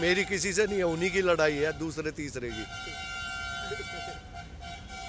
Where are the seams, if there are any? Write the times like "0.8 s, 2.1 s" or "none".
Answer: none

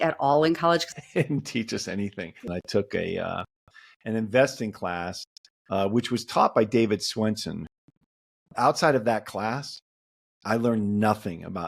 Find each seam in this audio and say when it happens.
0.9 s, 2.4 s, 7.6 s

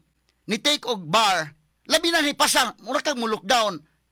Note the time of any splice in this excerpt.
none

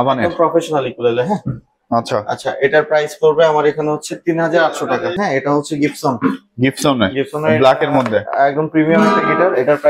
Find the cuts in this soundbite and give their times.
5.1 s

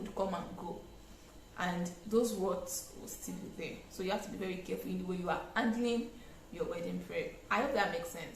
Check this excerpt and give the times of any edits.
none

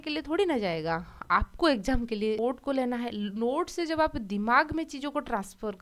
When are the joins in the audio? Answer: 2.4 s

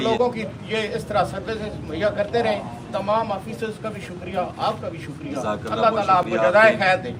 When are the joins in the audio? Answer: none

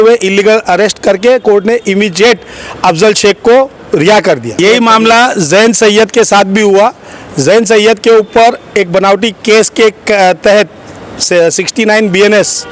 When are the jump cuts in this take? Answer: 4.5 s

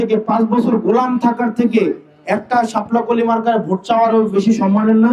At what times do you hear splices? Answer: none

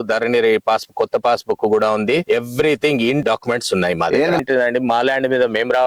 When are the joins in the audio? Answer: 2.2 s, 3.2 s, 4.4 s

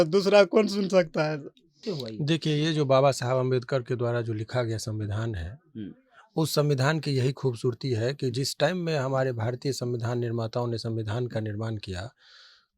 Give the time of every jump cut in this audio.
1.6 s

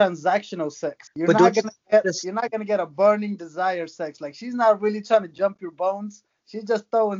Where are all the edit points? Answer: 1.0 s

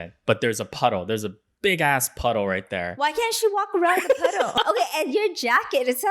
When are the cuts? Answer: 4.5 s

